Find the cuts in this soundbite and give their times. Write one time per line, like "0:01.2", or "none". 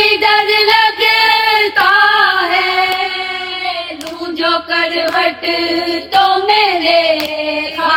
none

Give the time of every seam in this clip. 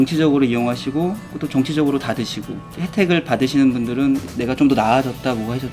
0:02.6
0:04.3

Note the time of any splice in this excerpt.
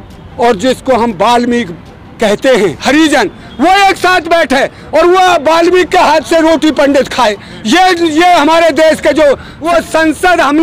0:09.5

